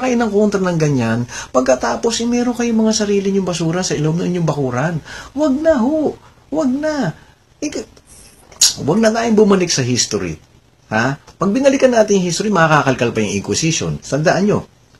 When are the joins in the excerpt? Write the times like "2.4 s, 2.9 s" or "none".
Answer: 13.5 s